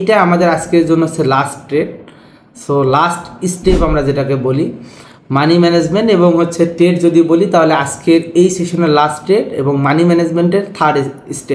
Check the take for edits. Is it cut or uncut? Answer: uncut